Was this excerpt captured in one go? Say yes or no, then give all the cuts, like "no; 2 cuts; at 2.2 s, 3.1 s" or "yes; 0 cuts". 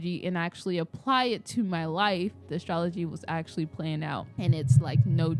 no; 2 cuts; at 2.5 s, 4.3 s